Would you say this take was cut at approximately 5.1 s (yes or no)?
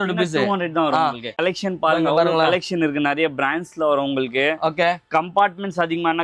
no